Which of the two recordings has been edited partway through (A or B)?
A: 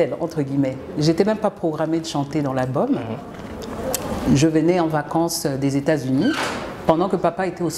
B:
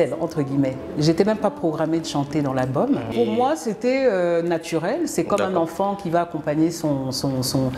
B